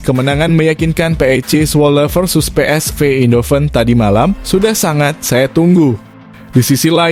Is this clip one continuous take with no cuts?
yes; 0 cuts

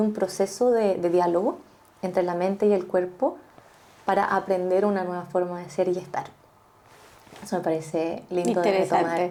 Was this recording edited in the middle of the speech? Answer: no; 0 cuts

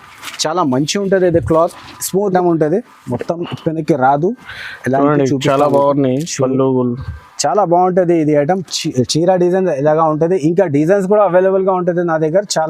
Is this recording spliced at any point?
yes; 1 cut; at 2.3 s

